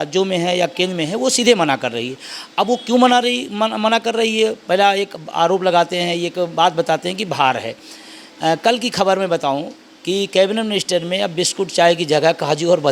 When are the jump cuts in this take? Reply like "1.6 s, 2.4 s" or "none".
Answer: none